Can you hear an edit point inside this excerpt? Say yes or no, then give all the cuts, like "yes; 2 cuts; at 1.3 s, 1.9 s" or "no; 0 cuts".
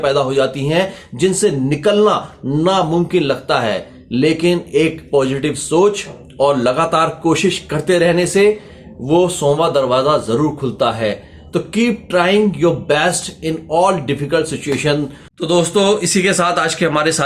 yes; 1 cut; at 15.3 s